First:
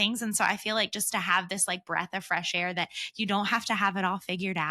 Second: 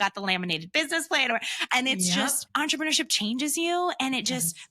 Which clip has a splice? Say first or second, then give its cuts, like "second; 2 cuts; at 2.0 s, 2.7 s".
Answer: second; 1 cut; at 2.4 s